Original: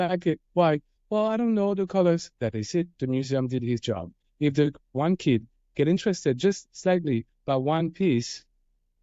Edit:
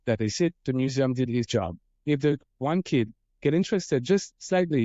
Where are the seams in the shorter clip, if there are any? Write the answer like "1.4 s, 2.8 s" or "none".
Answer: none